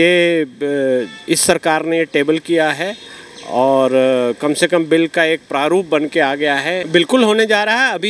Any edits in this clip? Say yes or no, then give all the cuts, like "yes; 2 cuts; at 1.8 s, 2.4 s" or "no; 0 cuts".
yes; 1 cut; at 6.8 s